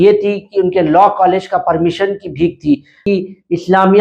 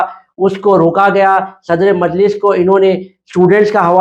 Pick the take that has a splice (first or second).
first